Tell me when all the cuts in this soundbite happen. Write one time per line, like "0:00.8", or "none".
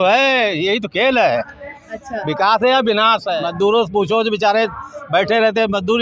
0:03.3